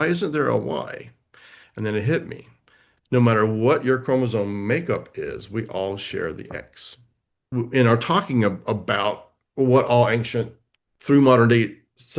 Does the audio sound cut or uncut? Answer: cut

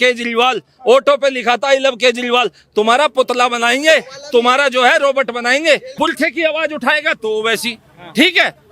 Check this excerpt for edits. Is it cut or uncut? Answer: cut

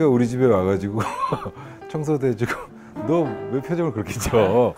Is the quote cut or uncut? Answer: uncut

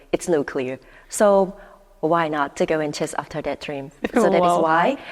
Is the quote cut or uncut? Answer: uncut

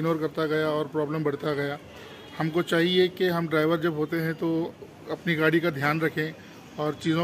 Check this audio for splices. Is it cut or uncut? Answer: uncut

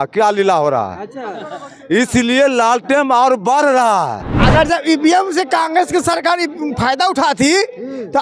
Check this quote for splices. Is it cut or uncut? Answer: cut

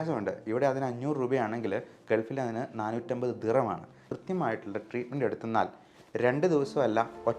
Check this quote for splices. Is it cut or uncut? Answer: cut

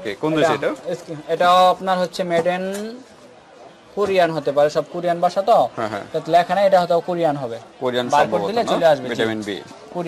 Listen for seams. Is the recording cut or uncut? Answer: uncut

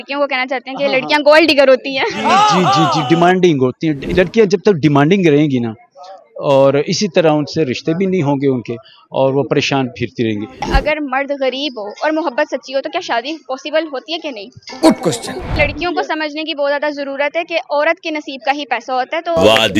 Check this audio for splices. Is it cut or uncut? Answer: cut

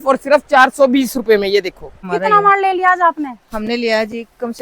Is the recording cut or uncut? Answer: cut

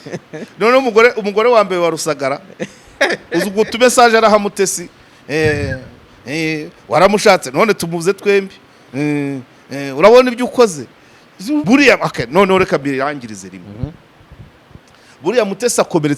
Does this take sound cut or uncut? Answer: cut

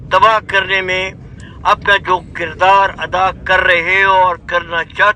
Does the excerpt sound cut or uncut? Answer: uncut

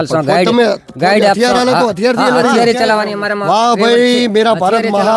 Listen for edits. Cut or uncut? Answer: uncut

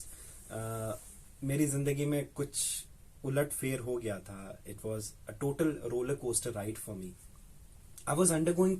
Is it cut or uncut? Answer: uncut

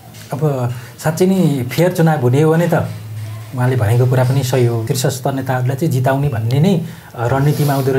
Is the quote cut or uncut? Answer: cut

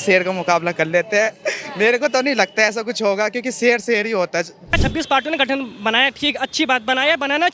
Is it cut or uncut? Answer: cut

